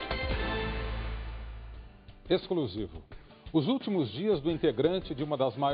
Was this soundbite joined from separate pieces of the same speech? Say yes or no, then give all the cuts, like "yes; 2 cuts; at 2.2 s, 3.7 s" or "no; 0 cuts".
no; 0 cuts